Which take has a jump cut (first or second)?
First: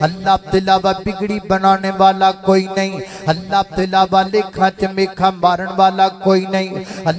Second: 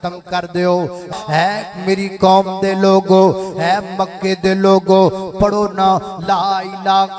second